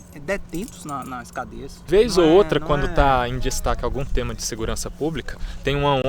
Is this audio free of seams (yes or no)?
no